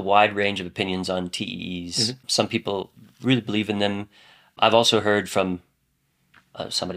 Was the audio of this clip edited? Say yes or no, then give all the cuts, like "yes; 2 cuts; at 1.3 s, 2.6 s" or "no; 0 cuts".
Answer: yes; 2 cuts; at 2.2 s, 4.5 s